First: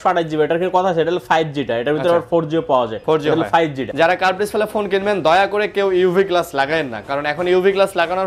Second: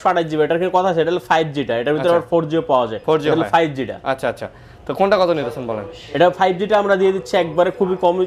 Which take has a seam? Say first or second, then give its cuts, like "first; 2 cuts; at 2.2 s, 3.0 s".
first; 1 cut; at 3.8 s